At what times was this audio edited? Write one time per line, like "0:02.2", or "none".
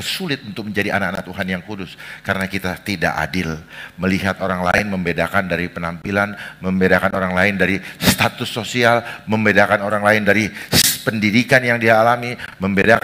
none